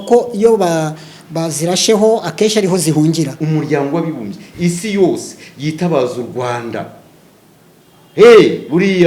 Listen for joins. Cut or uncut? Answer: cut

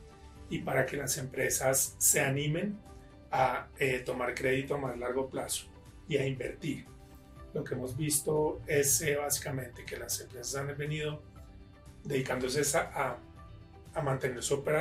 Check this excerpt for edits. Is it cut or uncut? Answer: uncut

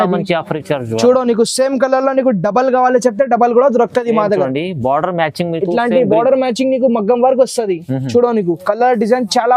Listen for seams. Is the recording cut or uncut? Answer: uncut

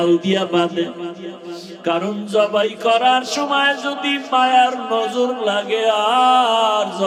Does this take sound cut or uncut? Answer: uncut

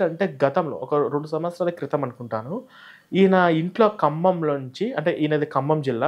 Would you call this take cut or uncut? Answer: uncut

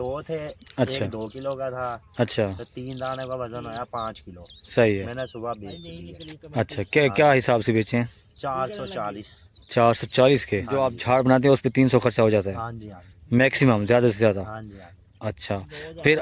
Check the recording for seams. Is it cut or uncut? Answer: cut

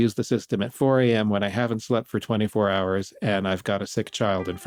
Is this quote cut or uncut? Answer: uncut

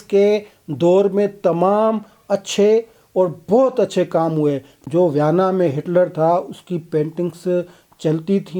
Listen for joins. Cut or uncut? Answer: cut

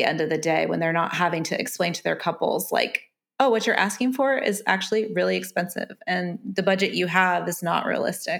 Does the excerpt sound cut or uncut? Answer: uncut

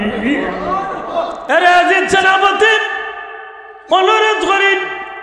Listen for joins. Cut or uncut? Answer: cut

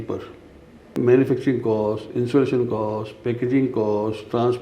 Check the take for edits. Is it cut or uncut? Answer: cut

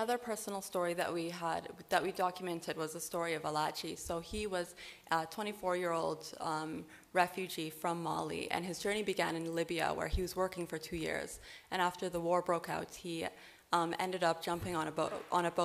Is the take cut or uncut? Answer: uncut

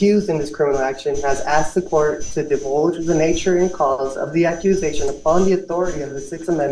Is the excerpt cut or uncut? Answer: uncut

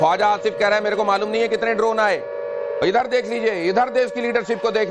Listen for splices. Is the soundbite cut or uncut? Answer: uncut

